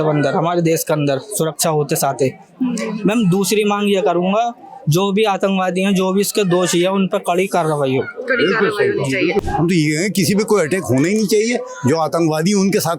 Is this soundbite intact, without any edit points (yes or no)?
yes